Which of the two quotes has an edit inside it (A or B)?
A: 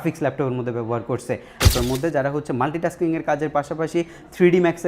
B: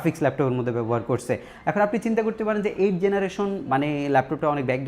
A